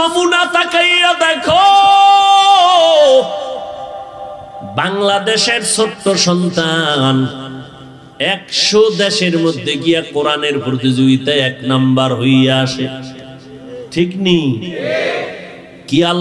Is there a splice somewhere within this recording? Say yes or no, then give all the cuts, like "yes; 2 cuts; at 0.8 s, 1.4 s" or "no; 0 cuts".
no; 0 cuts